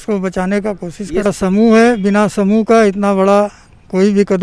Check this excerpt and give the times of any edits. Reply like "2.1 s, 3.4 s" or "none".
1.3 s